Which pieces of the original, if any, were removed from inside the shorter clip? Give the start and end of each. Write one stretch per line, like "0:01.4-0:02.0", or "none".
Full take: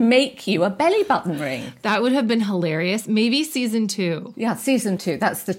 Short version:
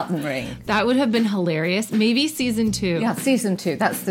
0:04.1-0:04.4